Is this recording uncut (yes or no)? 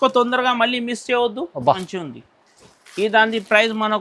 no